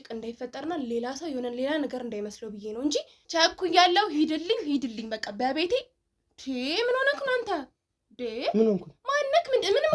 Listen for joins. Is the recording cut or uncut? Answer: cut